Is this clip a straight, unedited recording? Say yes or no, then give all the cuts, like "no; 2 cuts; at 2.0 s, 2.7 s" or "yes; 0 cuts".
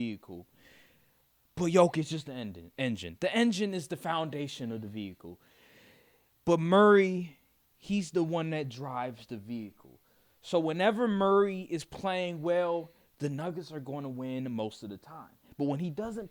yes; 0 cuts